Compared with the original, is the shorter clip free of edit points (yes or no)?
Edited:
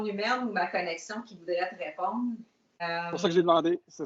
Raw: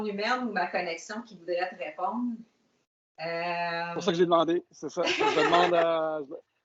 no